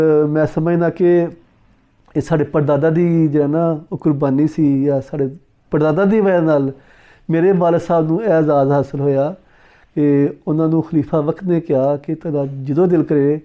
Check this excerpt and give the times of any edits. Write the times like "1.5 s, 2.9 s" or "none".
none